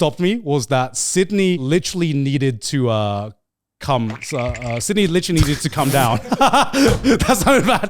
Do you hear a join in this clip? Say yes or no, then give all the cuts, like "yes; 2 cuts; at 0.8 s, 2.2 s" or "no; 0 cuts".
yes; 1 cut; at 1.6 s